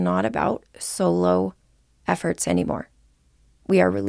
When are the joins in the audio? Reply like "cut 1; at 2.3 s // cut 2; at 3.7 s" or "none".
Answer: none

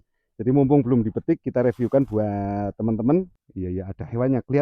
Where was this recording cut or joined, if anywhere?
cut 1; at 3.4 s

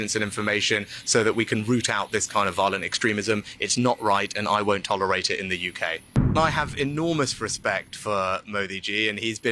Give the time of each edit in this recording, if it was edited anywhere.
cut 1; at 6.3 s

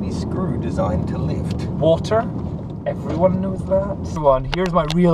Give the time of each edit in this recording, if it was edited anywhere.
cut 1; at 4.2 s

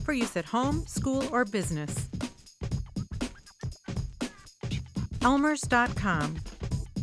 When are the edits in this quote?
cut 1; at 2.1 s // cut 2; at 4.6 s

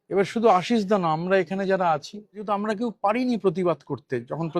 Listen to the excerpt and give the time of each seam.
cut 1; at 2.4 s

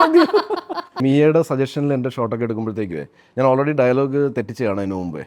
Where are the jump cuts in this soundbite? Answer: cut 1; at 1.0 s

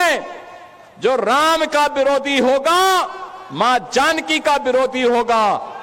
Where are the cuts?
cut 1; at 2.9 s

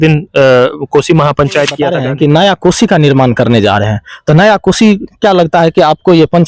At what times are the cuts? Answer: cut 1; at 1.9 s

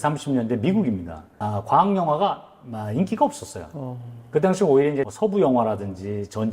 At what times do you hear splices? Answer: none

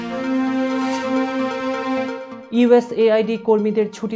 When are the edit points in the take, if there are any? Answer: cut 1; at 2.3 s

